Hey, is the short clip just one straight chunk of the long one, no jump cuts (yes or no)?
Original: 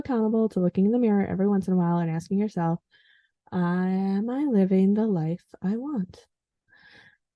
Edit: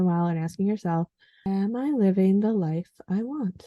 no